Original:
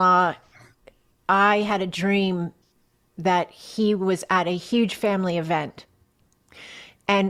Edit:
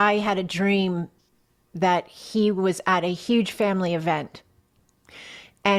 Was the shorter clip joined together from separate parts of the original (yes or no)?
no